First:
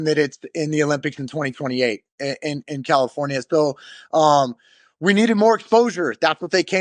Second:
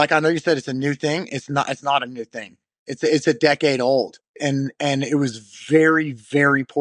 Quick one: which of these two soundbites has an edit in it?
second; 1 cut; at 4.4 s

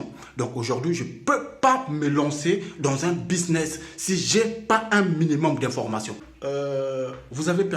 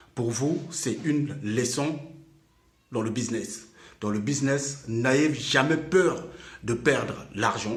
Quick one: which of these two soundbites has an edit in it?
first; 1 cut; at 6.3 s

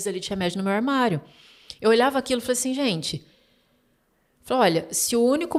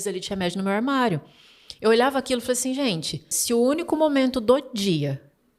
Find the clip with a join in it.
second; 1 cut; at 3.3 s

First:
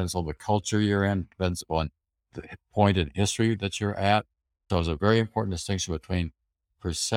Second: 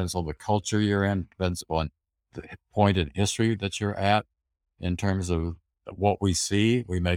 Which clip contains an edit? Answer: first; 1 cut; at 4.7 s

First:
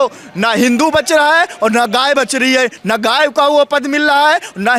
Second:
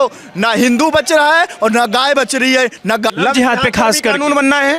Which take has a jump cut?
second; 1 cut; at 3.1 s

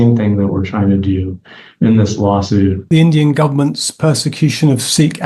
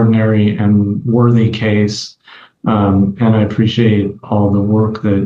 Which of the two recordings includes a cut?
first; 1 cut; at 2.8 s

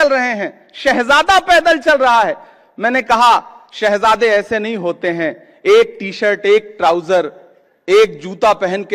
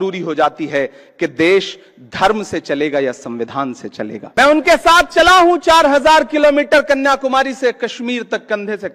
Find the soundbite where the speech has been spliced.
second; 1 cut; at 4.3 s

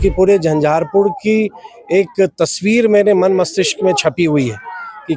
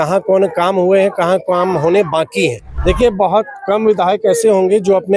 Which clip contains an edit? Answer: second; 1 cut; at 2.7 s

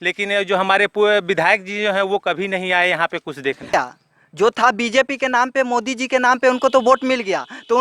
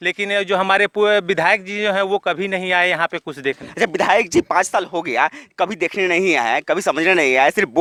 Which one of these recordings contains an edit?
first; 1 cut; at 3.7 s

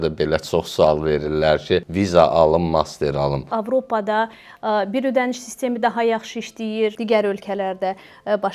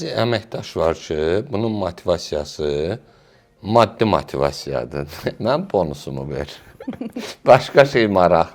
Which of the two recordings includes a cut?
first; 3 cuts; at 1.9 s, 3.5 s, 7.0 s

